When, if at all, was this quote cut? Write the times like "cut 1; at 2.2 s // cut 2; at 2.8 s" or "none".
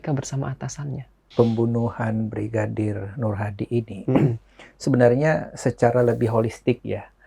cut 1; at 1.2 s